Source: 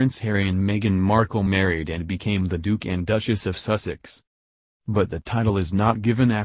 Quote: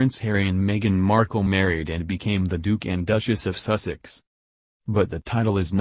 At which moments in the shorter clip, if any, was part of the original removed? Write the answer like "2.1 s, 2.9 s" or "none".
none